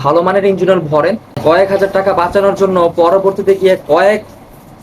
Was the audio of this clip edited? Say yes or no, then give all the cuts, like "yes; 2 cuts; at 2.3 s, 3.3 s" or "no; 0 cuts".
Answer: yes; 1 cut; at 1.4 s